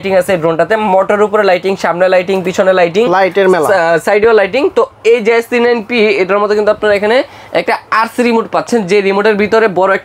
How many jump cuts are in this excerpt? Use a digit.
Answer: 0